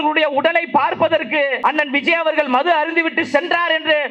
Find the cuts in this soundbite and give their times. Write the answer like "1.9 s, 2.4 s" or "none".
1.6 s

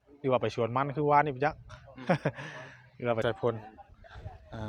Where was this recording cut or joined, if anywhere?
3.2 s

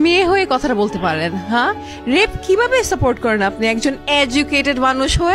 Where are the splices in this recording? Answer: none

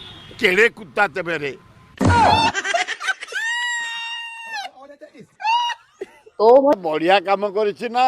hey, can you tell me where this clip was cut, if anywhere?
6.8 s

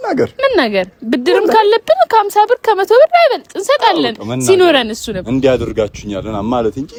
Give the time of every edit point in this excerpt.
none

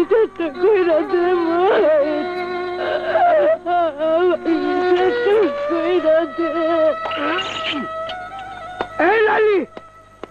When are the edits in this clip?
none

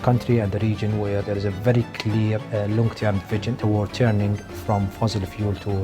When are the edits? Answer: 1.2 s, 2.4 s, 3.6 s

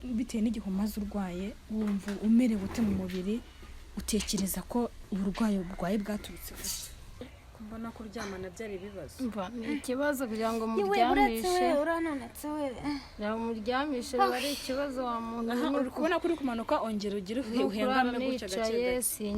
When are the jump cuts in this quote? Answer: 7.2 s

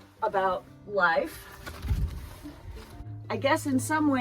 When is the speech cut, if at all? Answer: 2.6 s

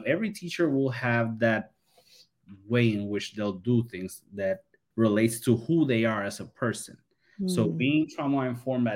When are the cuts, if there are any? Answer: 4.8 s

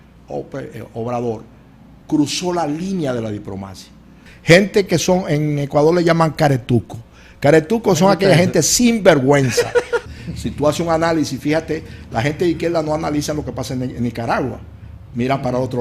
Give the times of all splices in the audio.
4.3 s, 10.1 s

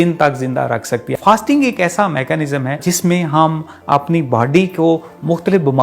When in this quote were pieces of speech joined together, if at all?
1.1 s, 2.8 s

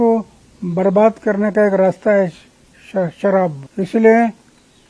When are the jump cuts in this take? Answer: 3.6 s

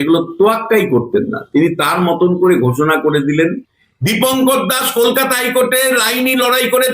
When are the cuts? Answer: 3.4 s

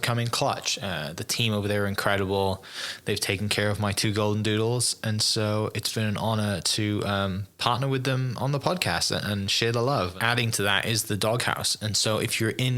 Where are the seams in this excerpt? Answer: 10.1 s

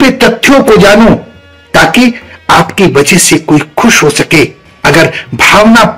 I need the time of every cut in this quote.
none

